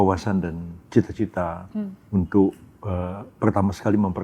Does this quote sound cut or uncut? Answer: uncut